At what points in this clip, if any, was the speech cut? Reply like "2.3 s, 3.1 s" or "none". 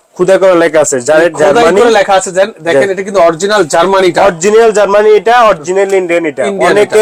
none